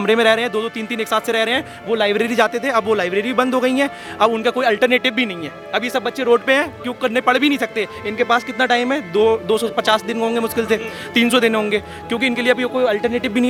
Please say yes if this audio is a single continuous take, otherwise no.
yes